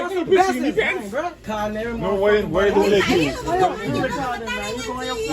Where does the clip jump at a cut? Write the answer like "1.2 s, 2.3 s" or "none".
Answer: 1.4 s